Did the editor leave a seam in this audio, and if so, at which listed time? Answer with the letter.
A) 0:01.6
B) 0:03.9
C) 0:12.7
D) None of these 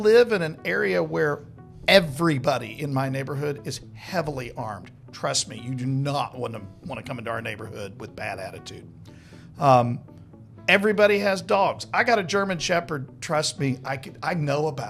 D